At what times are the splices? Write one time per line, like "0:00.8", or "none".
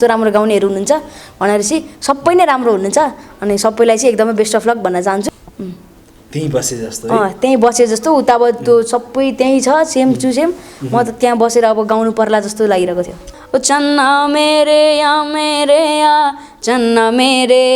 0:05.3
0:13.3